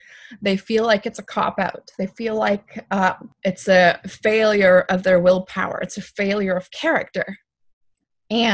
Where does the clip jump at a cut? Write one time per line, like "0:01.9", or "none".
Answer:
0:03.3